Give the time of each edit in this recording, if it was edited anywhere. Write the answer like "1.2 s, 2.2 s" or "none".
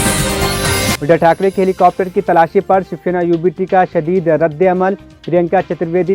1.0 s